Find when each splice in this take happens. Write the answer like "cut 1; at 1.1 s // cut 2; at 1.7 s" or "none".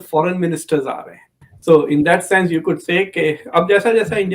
cut 1; at 1.3 s